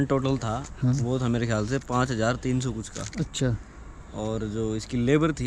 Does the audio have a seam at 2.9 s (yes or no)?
no